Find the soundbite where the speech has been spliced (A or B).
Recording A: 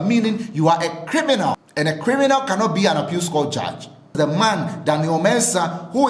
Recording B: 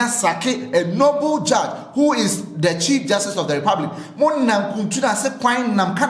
A